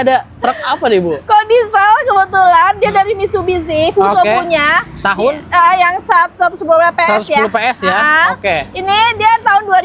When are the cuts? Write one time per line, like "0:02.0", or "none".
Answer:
none